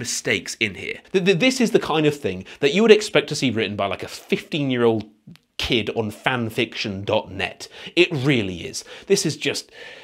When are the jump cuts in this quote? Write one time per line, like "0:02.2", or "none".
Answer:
0:01.0